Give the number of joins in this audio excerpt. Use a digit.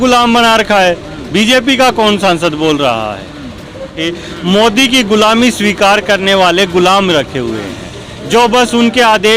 1